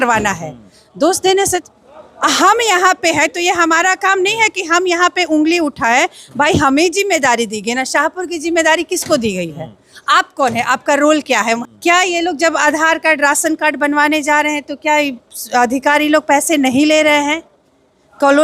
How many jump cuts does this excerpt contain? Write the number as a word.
two